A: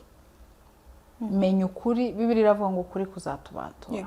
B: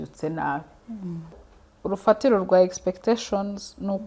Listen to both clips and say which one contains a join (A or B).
B